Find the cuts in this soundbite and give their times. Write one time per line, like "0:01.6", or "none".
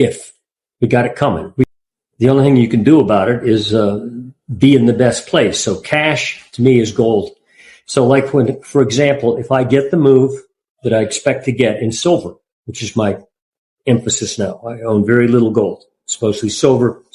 0:01.7